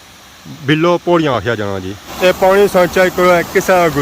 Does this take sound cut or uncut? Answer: cut